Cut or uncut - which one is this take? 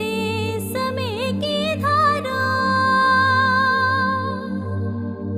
uncut